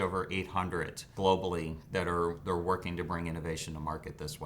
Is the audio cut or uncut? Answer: cut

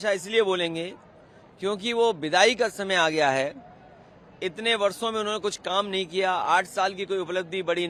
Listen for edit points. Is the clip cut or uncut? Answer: uncut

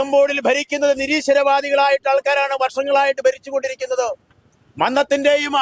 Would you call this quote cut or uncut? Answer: uncut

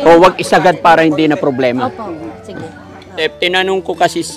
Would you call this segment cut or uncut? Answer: cut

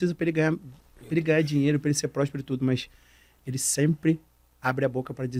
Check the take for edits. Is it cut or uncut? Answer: uncut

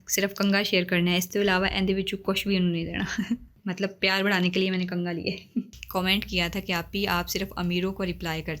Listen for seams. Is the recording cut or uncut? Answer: cut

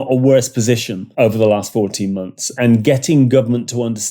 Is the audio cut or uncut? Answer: cut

